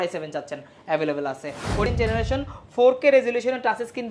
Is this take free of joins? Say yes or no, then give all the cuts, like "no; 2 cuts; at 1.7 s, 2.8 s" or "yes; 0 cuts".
no; 1 cut; at 1.9 s